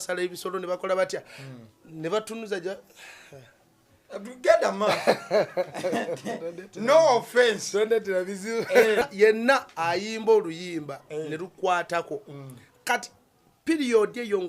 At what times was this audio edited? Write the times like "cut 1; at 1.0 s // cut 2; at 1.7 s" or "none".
cut 1; at 9.1 s